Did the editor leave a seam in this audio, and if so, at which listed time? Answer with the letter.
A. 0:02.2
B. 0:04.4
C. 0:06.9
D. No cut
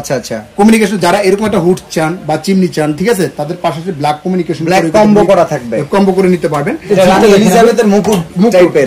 C